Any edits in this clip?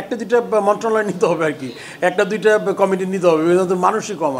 no; 0 cuts

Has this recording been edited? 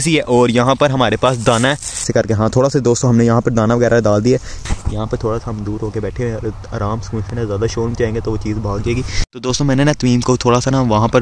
yes; 3 cuts; at 2.1 s, 4.6 s, 9.2 s

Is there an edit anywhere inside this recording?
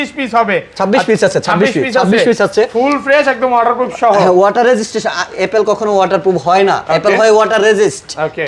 no; 0 cuts

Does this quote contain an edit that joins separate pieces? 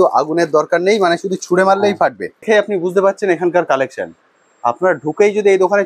yes; 1 cut; at 2.5 s

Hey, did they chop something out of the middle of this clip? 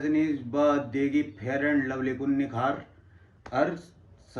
no; 0 cuts

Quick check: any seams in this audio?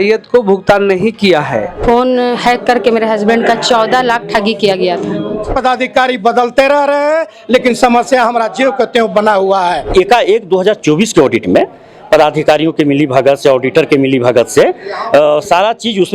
yes; 3 cuts; at 1.7 s, 5.5 s, 9.9 s

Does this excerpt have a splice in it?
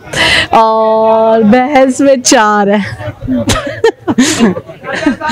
no; 0 cuts

